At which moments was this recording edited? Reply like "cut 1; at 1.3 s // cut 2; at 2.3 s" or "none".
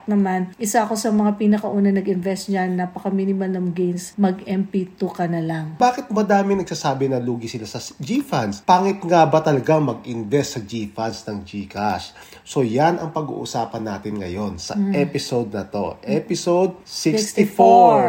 cut 1; at 5.7 s